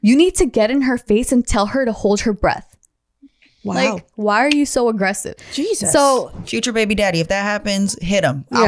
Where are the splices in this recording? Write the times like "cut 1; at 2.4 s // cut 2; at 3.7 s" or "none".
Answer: cut 1; at 4.1 s // cut 2; at 5.3 s